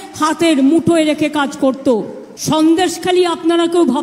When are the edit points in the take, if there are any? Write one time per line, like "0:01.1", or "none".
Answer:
0:02.2